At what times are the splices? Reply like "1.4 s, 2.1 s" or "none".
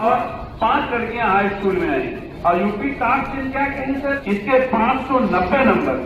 4.2 s